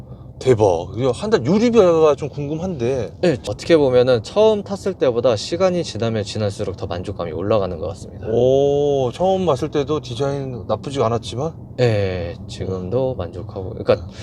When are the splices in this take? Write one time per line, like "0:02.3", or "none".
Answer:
0:03.4